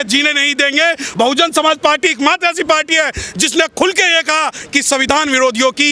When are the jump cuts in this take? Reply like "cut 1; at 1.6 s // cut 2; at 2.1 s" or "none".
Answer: cut 1; at 1.1 s